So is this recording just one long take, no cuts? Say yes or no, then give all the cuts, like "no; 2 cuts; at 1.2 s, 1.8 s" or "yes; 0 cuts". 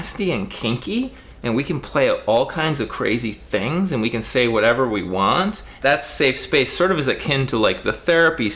no; 1 cut; at 5.7 s